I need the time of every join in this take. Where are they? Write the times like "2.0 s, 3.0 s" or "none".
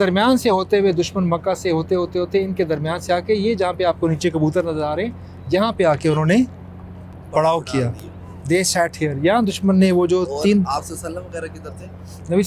none

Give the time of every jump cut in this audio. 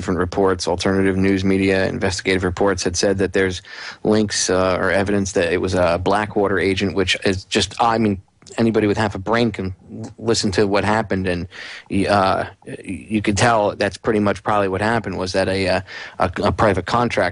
10.0 s

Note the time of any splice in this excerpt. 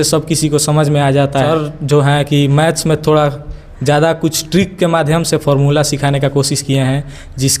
1.5 s

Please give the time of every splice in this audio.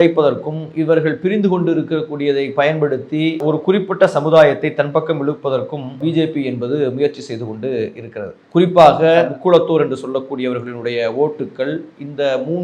6.0 s, 9.3 s

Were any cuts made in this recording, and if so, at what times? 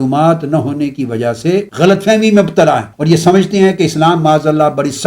1.7 s, 2.9 s

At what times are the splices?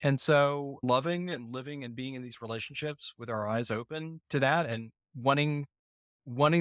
0.8 s, 4.2 s

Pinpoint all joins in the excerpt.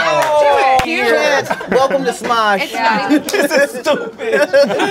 0.8 s, 3.3 s

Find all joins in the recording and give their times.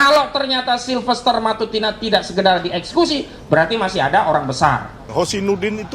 5.1 s

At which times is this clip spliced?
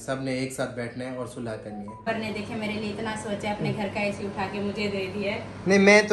2.0 s

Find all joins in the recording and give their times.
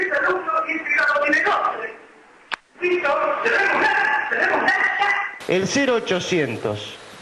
5.3 s

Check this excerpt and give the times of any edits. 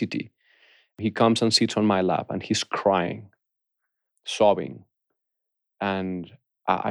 1.0 s

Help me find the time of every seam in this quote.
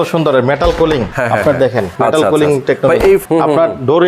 1.1 s, 1.9 s, 3.2 s

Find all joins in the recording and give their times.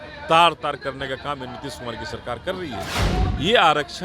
2.9 s

